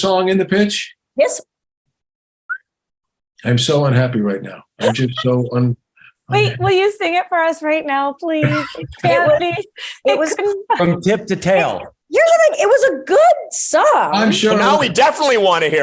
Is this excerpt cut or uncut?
uncut